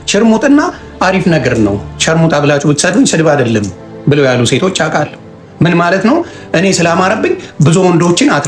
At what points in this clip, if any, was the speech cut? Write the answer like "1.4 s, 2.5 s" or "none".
none